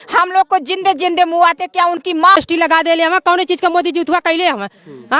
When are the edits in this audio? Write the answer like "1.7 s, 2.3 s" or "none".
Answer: 2.3 s